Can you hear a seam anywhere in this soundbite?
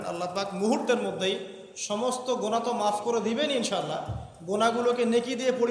no; 0 cuts

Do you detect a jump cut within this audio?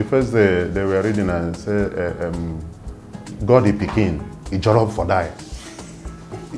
no; 0 cuts

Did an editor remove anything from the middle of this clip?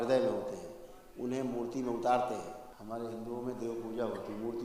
yes; 1 cut; at 2.7 s

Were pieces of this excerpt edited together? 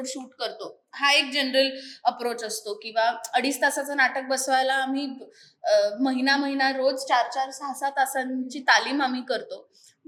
no; 0 cuts

